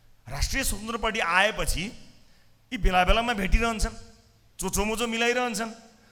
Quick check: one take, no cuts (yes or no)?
yes